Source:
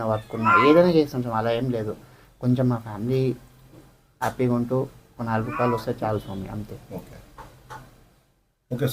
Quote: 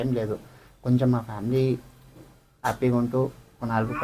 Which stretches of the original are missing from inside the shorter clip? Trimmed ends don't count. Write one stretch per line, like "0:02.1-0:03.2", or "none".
none